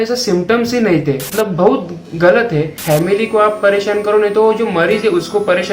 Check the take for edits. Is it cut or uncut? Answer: cut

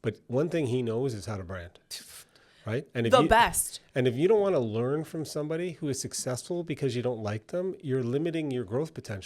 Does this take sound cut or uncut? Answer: uncut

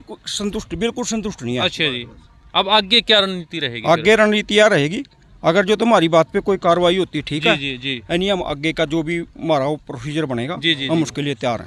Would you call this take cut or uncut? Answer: uncut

